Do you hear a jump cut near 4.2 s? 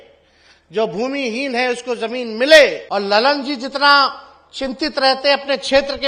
no; 1 cut; at 2.8 s

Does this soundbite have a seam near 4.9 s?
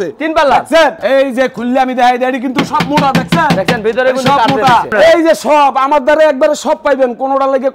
yes; 2 cuts; at 1.0 s, 4.9 s

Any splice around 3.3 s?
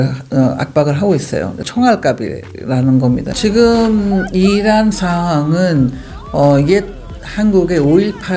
yes; 1 cut; at 3.3 s

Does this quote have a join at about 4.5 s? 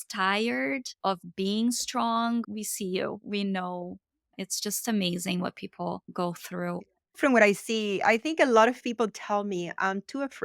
yes; 1 cut; at 4.5 s

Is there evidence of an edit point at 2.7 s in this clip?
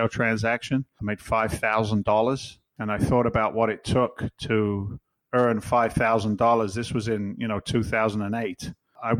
no; 1 cut; at 0.9 s

